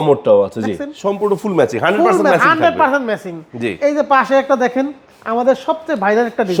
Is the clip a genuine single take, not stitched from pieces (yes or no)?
yes